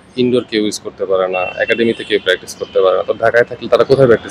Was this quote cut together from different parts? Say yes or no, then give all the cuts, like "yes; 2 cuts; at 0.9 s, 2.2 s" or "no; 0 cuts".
no; 0 cuts